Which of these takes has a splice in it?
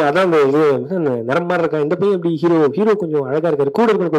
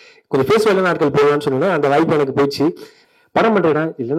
second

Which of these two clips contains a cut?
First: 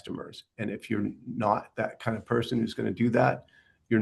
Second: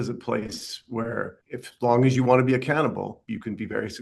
second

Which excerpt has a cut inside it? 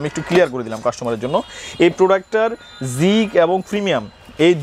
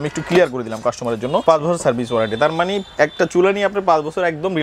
second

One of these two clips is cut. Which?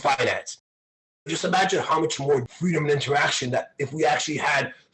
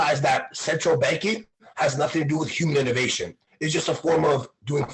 first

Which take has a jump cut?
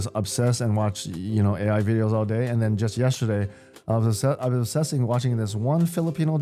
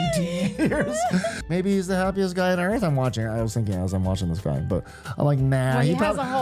second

